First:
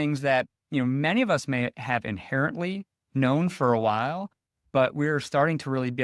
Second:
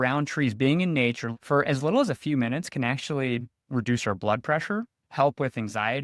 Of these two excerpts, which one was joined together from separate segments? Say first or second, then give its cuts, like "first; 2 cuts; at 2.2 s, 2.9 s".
second; 1 cut; at 1.3 s